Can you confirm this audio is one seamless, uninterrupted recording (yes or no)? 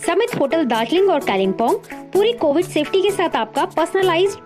yes